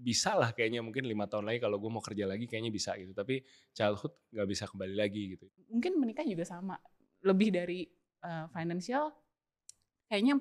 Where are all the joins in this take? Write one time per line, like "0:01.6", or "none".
0:05.4